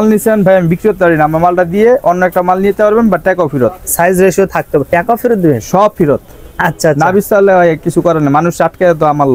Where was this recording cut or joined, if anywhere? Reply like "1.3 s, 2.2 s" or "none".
none